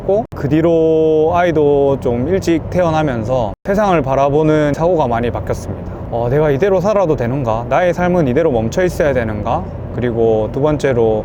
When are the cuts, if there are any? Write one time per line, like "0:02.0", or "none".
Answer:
none